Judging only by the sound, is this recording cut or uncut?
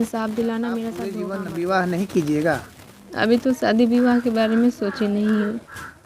cut